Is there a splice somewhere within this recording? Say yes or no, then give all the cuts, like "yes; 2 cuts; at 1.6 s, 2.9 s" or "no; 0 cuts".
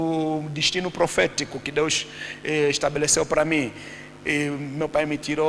no; 0 cuts